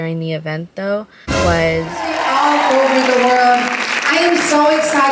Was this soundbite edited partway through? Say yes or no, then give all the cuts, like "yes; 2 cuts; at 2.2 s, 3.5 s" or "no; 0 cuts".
yes; 1 cut; at 2.1 s